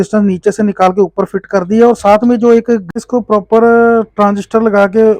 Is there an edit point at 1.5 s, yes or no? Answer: no